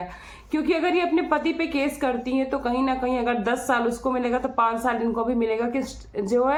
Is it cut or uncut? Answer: uncut